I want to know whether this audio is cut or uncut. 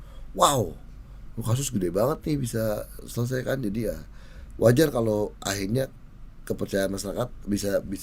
uncut